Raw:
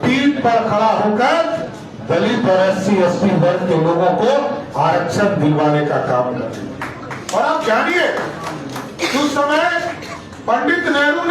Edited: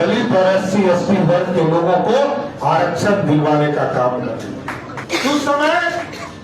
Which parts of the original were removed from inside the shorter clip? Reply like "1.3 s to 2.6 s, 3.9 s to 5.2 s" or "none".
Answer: 7.1 s to 8.8 s